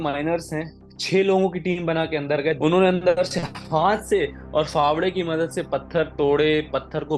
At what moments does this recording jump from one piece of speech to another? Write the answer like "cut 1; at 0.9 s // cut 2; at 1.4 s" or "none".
cut 1; at 2.6 s